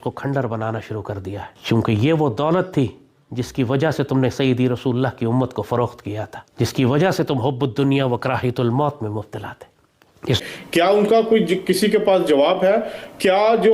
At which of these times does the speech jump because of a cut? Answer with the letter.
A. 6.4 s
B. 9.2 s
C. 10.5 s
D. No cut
C